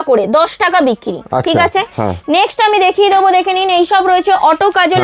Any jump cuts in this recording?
no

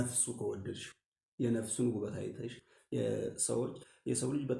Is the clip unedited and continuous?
yes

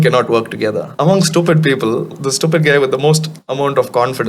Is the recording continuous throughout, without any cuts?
no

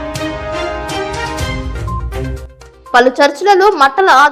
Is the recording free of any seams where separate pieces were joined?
no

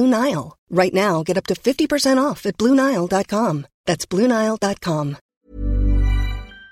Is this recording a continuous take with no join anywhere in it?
no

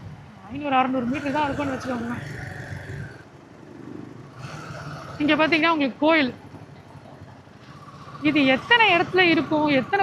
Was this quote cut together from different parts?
yes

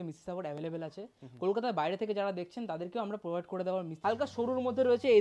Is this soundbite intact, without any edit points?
no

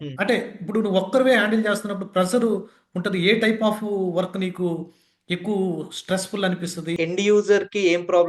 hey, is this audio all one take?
no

